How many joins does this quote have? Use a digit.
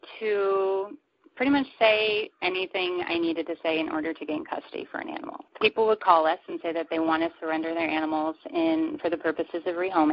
1